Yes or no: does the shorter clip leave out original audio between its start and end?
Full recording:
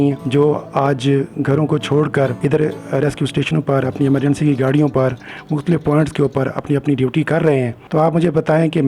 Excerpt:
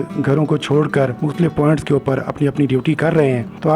yes